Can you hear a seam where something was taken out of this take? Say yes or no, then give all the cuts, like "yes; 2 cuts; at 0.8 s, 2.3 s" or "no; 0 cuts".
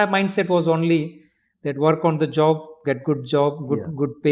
no; 0 cuts